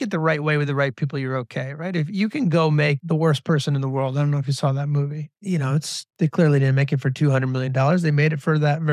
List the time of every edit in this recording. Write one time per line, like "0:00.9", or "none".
0:03.0
0:06.0